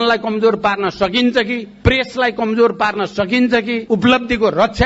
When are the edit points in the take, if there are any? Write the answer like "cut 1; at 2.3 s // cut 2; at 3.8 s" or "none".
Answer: cut 1; at 3.8 s